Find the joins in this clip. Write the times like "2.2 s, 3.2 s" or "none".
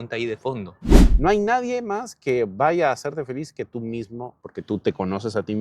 1.0 s, 4.4 s